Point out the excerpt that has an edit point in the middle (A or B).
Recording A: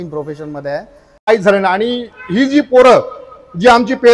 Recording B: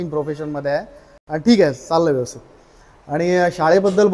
A